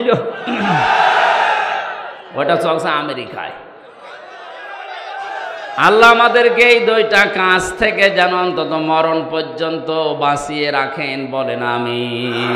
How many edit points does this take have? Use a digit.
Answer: 0